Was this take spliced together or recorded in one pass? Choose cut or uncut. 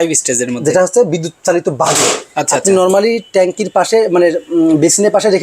uncut